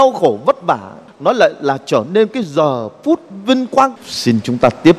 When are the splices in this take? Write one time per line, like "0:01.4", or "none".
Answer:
0:01.0
0:03.9